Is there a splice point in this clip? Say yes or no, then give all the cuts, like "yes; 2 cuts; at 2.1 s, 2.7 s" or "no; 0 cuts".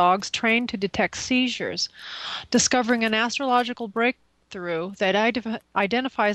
no; 0 cuts